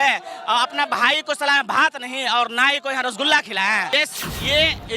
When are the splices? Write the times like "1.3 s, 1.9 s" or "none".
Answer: 3.9 s